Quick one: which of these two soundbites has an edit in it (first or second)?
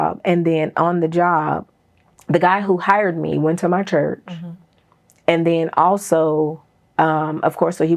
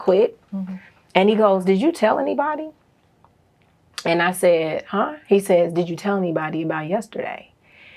first